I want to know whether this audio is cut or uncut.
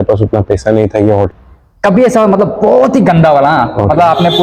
cut